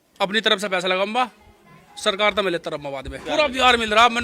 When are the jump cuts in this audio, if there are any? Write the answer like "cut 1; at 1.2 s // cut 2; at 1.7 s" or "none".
cut 1; at 3.1 s